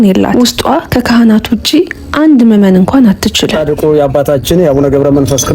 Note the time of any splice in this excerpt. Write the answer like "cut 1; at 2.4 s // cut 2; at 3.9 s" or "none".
cut 1; at 3.6 s